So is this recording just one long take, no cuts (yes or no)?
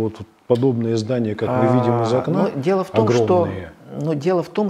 yes